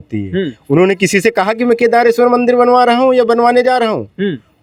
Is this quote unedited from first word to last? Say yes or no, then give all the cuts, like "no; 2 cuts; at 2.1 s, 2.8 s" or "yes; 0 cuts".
yes; 0 cuts